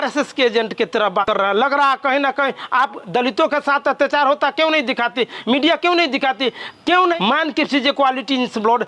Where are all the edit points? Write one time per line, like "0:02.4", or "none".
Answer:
0:01.2
0:07.2